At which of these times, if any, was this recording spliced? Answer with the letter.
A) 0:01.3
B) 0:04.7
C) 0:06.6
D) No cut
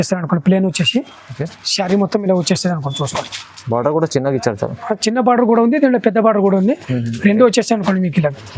D